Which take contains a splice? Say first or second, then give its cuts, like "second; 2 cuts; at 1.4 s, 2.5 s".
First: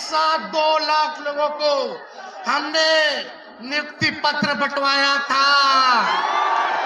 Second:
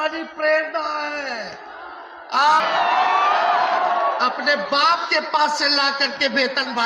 second; 1 cut; at 2.6 s